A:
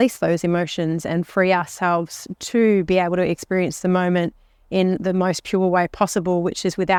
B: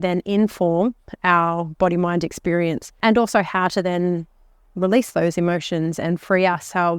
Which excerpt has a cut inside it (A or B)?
B